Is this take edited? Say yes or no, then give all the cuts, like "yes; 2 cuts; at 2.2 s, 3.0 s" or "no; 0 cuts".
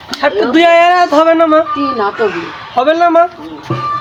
no; 0 cuts